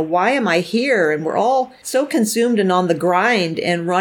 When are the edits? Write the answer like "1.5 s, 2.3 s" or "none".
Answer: 1.8 s